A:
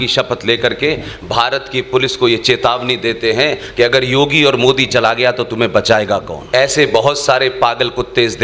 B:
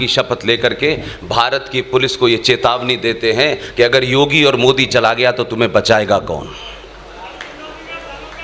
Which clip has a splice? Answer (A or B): A